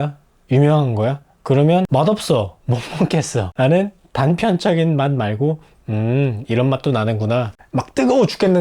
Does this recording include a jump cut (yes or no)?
yes